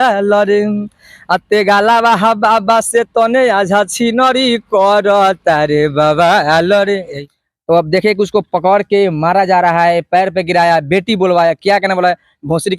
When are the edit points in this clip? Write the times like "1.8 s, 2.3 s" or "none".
7.2 s